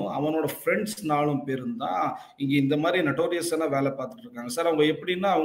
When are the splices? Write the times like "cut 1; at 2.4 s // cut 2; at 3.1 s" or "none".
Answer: none